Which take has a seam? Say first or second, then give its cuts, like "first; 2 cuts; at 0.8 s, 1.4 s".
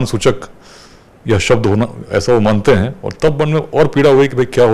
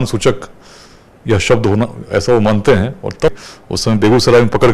second; 1 cut; at 3.3 s